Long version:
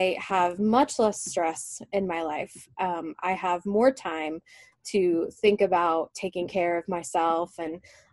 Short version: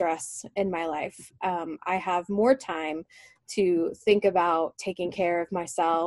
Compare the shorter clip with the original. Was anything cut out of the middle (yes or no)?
no